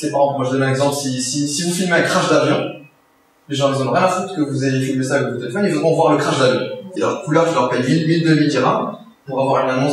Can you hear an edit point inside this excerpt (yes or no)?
yes